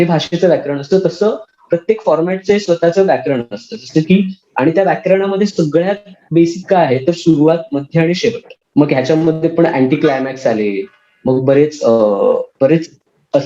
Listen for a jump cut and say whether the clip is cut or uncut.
cut